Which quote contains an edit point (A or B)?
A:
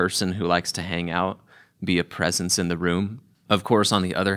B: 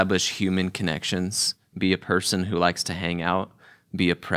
A